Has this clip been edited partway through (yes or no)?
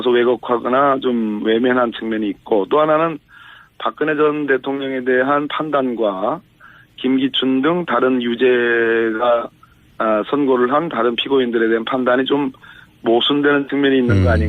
no